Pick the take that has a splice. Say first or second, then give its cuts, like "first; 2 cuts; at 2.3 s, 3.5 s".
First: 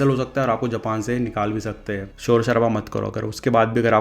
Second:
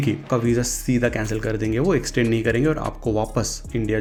first; 1 cut; at 2.1 s